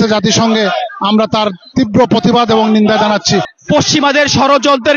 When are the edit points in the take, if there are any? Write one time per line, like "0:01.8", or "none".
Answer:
0:03.5